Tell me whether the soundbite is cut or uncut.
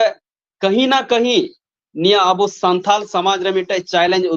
uncut